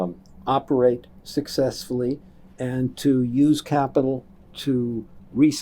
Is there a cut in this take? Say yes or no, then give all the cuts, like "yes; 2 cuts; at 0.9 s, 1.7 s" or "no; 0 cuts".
no; 0 cuts